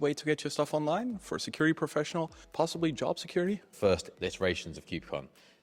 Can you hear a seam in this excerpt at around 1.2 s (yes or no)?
no